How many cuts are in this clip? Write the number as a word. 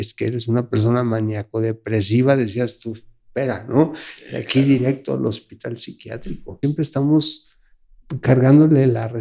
one